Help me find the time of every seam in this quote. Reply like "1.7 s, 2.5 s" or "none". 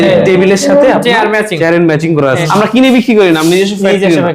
2.3 s